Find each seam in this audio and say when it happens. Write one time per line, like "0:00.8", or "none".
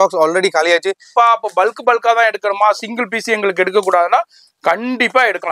0:01.1